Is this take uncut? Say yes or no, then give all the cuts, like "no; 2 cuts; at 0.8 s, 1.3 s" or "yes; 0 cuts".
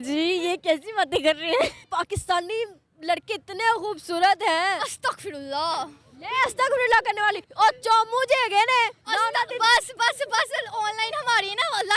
no; 1 cut; at 1.9 s